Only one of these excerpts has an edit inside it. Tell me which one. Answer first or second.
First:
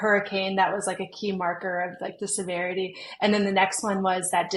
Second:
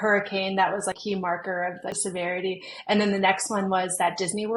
second